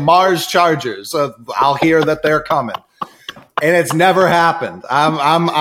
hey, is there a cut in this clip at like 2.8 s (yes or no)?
no